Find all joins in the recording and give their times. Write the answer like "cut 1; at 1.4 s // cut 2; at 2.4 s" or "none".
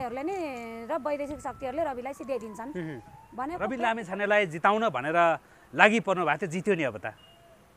cut 1; at 3.6 s